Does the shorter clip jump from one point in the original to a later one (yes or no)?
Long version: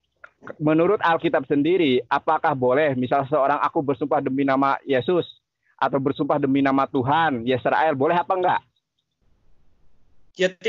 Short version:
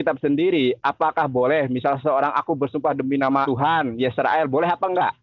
yes